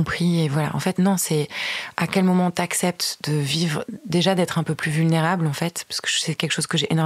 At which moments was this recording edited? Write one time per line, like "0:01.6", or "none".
none